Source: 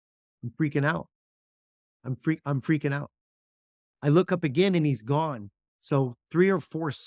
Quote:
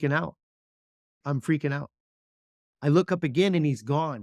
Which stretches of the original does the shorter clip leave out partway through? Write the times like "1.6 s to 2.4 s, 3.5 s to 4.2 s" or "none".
1.9 s to 2.4 s

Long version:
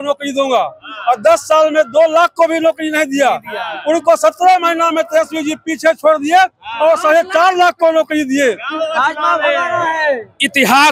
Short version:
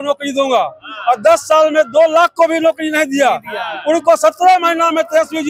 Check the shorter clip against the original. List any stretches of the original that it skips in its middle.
none

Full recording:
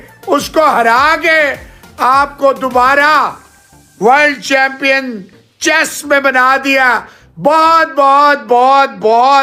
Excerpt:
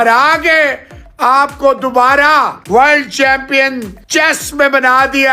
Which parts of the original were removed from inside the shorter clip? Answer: 3.4 s to 3.9 s, 5.2 s to 5.4 s

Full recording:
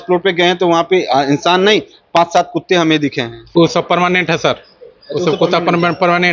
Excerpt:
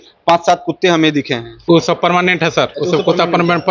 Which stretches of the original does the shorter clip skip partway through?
4.6 s to 5.1 s

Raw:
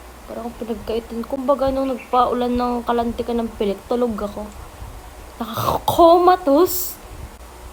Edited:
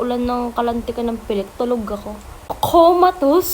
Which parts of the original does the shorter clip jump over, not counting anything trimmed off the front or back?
4.9 s to 5.8 s

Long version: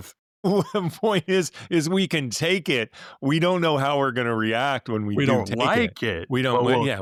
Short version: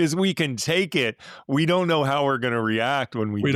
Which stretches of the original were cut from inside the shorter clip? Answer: none

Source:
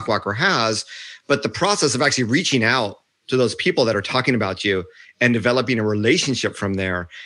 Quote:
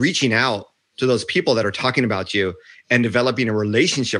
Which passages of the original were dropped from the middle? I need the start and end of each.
none

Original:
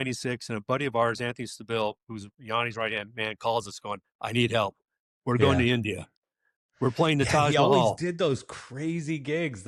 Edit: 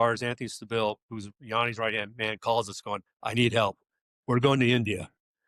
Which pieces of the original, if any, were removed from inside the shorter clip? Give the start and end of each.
none

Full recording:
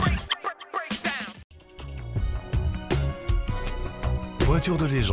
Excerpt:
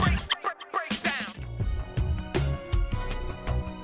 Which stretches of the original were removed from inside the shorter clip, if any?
1.4 s to 2.0 s

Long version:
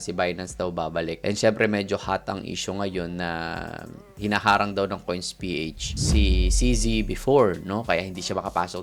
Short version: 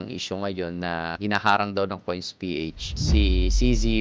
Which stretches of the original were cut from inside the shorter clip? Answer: 3.5 s to 4.1 s

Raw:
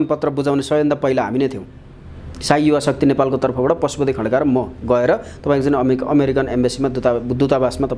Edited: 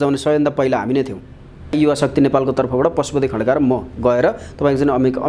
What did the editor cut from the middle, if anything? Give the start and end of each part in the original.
2.2 s to 2.6 s

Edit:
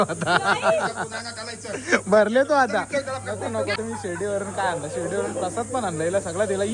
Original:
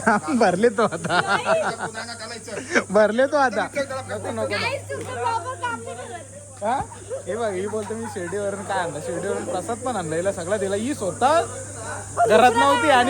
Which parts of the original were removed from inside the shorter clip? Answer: 4.6 s to 7.9 s

